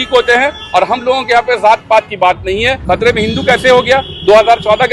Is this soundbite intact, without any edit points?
no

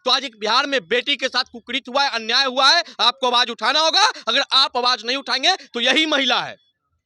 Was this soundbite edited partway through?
no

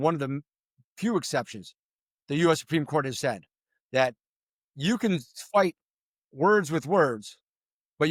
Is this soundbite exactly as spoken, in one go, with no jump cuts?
yes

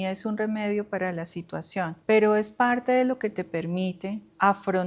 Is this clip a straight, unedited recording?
yes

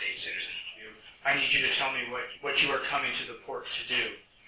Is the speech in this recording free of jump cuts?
no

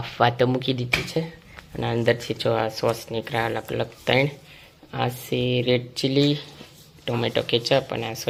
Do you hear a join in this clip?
no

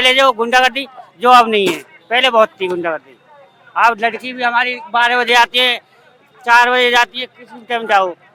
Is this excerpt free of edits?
yes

